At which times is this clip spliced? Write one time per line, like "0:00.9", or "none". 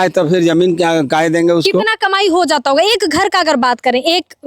none

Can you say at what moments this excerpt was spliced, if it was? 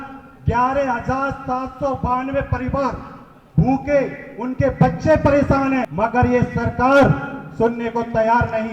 0:05.9

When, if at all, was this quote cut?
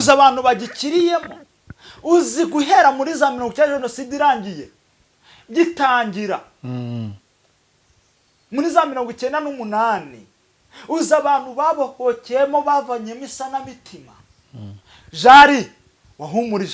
none

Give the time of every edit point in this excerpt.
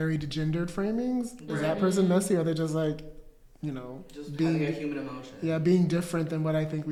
none

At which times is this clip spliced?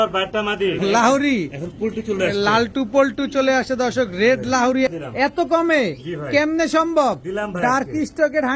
0:00.8
0:05.0

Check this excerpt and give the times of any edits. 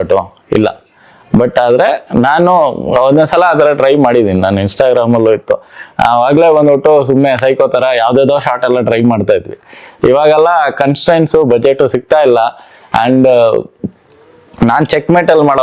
none

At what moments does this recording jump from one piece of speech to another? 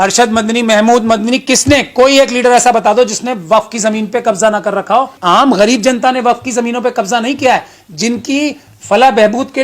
0:05.1

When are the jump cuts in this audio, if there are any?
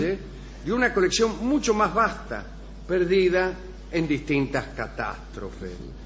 none

